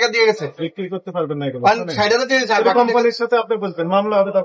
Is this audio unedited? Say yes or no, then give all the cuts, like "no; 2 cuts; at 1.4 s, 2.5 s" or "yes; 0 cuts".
yes; 0 cuts